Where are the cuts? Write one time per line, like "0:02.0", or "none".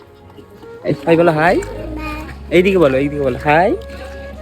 0:01.0